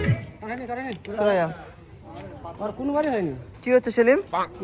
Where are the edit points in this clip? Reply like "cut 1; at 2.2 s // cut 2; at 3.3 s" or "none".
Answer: cut 1; at 3.5 s